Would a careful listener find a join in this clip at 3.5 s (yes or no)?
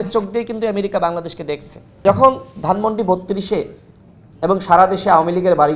no